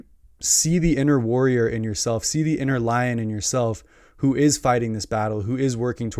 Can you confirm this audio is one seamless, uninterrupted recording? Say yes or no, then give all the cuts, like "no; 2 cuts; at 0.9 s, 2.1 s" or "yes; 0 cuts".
yes; 0 cuts